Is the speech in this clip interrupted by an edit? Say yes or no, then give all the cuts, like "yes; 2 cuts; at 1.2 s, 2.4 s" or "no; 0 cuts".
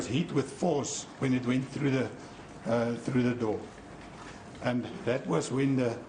no; 0 cuts